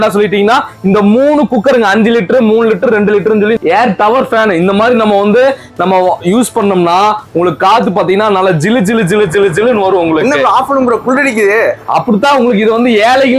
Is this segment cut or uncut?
cut